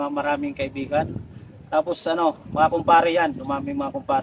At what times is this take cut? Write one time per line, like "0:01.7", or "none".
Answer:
none